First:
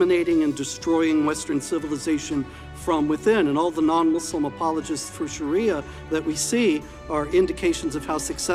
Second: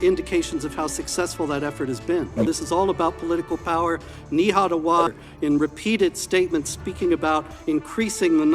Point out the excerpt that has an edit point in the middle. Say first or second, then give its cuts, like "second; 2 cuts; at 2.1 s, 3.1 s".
second; 2 cuts; at 2.5 s, 5.2 s